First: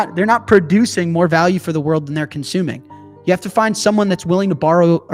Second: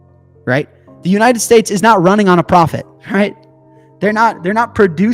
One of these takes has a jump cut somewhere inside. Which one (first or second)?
second